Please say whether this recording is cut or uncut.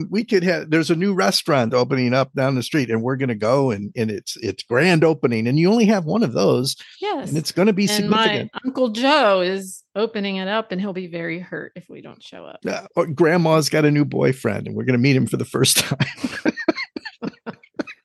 uncut